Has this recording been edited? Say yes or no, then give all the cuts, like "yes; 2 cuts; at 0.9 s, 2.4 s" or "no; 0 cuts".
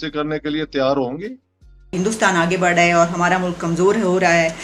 yes; 1 cut; at 2.0 s